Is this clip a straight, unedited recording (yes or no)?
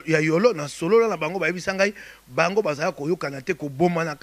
yes